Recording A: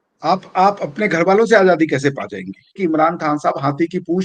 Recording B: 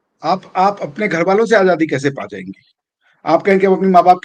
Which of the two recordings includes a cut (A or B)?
A